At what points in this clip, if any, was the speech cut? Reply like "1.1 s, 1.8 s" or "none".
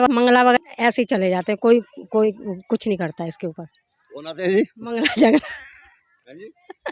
none